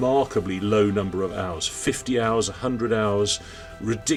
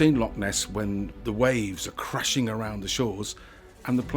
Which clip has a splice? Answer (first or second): second